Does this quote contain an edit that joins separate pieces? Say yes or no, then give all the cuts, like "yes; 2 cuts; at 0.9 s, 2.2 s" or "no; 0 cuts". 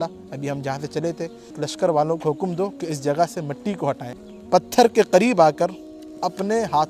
yes; 2 cuts; at 1.7 s, 4.7 s